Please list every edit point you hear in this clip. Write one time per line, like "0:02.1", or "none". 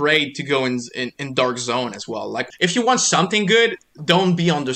0:02.4